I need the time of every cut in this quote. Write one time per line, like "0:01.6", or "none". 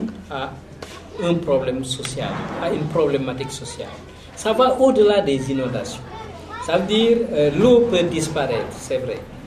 none